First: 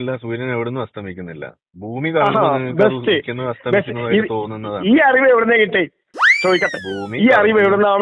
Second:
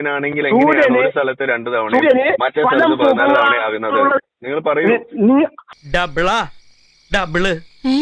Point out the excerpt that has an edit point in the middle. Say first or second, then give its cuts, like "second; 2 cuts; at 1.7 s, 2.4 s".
second; 1 cut; at 5.7 s